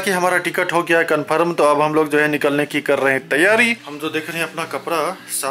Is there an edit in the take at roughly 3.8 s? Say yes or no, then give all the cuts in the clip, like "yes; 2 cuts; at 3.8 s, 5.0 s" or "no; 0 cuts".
yes; 1 cut; at 3.8 s